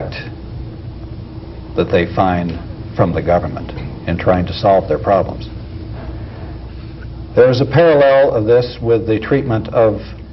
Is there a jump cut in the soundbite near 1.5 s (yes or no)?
no